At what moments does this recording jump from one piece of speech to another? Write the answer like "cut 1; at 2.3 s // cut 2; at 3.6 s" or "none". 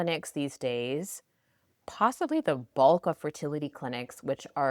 none